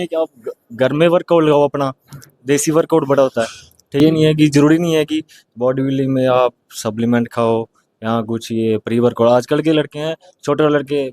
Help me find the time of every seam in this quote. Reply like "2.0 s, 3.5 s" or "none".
4.0 s